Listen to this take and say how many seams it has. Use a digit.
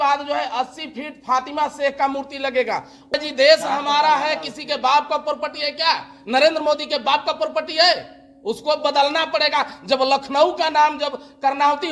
1